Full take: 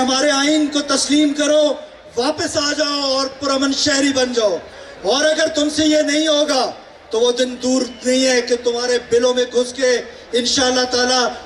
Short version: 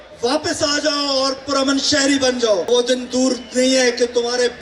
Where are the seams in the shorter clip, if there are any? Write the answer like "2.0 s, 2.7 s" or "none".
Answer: 2.7 s